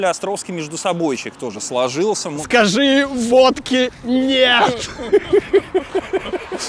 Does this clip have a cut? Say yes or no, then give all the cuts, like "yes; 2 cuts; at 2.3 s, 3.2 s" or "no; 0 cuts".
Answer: yes; 1 cut; at 2.4 s